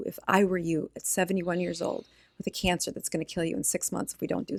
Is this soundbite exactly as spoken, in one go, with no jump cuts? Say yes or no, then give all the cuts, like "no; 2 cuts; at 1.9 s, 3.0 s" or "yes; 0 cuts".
yes; 0 cuts